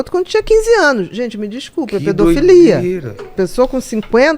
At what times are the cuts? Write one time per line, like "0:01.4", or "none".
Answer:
0:03.3